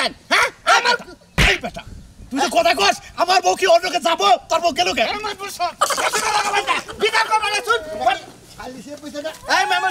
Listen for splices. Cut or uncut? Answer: uncut